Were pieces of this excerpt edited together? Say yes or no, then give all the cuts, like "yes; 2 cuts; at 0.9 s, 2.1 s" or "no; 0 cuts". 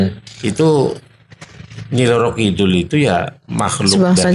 no; 0 cuts